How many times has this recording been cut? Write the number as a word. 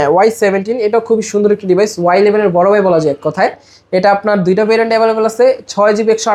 zero